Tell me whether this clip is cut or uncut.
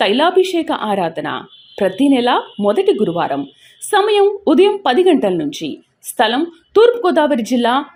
uncut